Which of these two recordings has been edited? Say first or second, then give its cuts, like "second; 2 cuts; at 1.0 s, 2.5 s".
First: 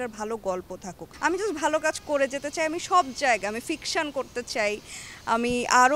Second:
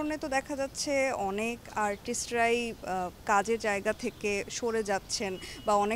first; 1 cut; at 1.0 s